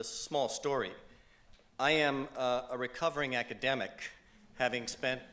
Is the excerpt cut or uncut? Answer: uncut